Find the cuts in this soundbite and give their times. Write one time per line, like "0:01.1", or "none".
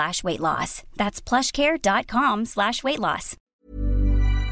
0:03.5

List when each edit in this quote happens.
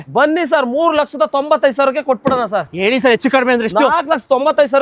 0:02.7

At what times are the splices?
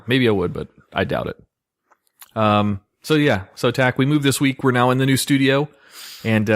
0:04.5

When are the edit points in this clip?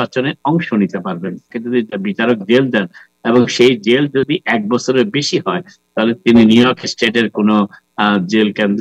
0:01.4

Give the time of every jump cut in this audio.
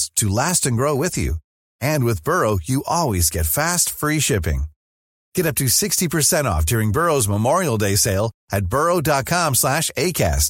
none

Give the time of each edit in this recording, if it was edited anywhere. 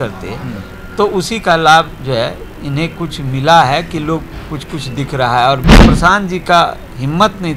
0:05.6

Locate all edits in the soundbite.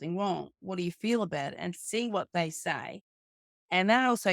none

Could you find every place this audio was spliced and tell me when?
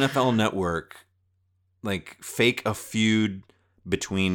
none

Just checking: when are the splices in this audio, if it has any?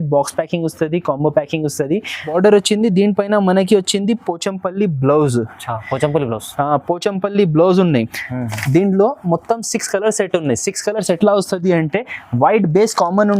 0:02.3

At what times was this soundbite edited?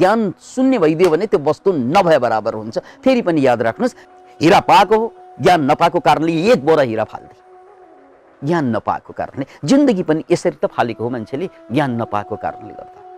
0:03.9

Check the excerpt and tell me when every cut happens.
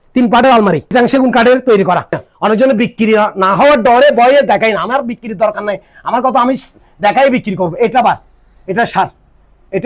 0:00.9
0:02.2

